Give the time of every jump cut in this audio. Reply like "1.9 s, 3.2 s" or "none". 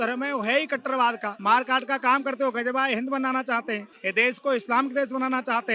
1.3 s, 3.9 s